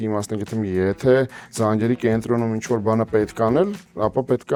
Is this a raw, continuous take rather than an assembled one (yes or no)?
yes